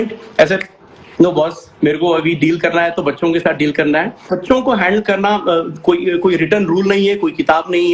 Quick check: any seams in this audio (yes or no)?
yes